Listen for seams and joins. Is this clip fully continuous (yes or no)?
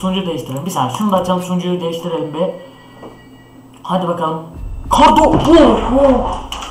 yes